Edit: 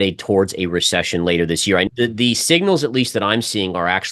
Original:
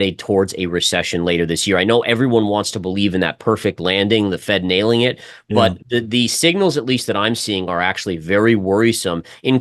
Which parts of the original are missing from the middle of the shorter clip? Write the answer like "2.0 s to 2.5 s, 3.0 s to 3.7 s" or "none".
1.9 s to 5.8 s